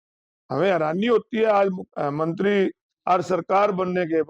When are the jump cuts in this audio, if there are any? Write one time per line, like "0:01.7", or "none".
0:02.9